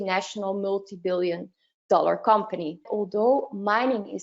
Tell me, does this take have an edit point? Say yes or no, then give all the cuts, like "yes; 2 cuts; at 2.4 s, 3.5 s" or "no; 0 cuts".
yes; 1 cut; at 2.9 s